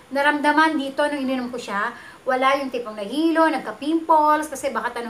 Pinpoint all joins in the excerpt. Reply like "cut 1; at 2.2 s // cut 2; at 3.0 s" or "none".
none